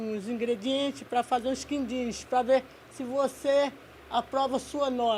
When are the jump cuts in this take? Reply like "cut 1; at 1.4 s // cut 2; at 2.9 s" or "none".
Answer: none